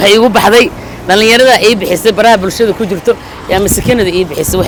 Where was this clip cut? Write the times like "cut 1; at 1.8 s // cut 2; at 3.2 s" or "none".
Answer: none